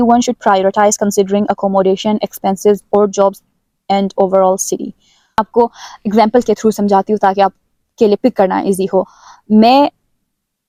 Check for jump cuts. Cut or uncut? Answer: uncut